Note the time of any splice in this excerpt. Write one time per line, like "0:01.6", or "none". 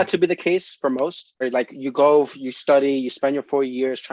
0:01.4